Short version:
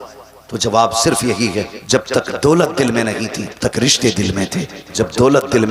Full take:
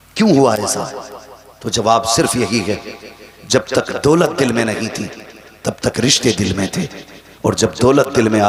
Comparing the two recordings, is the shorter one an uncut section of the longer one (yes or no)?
no